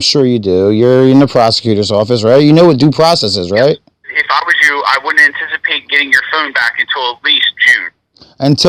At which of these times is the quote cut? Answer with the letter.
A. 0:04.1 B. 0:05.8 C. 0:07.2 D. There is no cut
A